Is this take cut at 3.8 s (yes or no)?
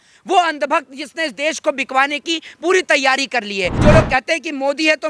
yes